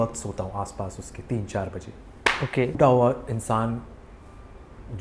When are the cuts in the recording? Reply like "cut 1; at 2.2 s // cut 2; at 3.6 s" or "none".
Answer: cut 1; at 2.8 s

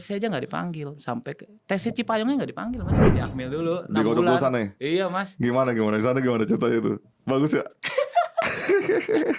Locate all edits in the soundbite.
cut 1; at 3.0 s

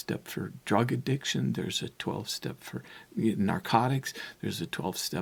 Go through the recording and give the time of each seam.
none

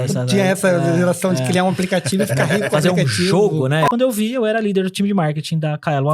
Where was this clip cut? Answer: cut 1; at 3.9 s

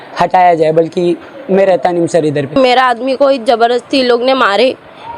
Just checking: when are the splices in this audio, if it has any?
cut 1; at 2.5 s

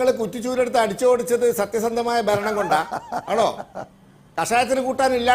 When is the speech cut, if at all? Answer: cut 1; at 3.3 s

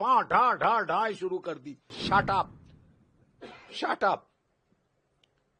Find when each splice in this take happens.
cut 1; at 2.0 s

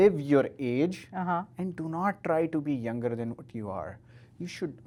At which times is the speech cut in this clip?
none

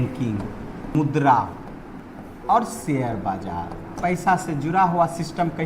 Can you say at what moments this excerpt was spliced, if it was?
cut 1; at 0.9 s // cut 2; at 2.0 s // cut 3; at 3.9 s

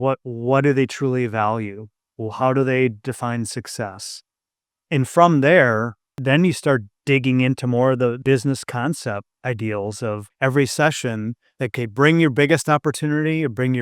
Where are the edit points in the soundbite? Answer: cut 1; at 6.2 s // cut 2; at 6.9 s // cut 3; at 8.2 s // cut 4; at 9.3 s // cut 5; at 10.3 s // cut 6; at 11.7 s

